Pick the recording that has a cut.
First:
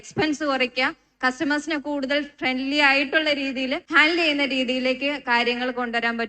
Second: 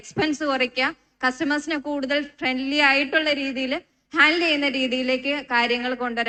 first; 1 cut; at 3.8 s

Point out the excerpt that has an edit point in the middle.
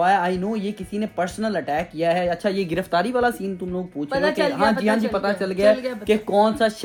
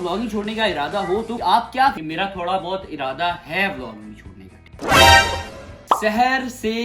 second; 2 cuts; at 2.0 s, 5.8 s

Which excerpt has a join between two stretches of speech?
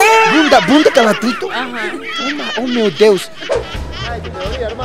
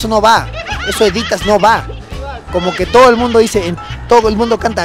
first; 1 cut; at 3.9 s

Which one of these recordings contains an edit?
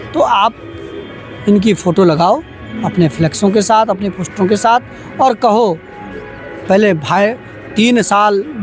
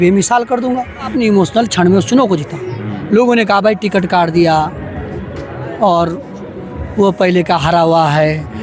second; 1 cut; at 1.1 s

